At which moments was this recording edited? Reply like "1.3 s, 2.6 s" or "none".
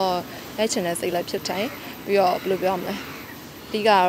none